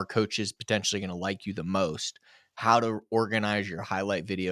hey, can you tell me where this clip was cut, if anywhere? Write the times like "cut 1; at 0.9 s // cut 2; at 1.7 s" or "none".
none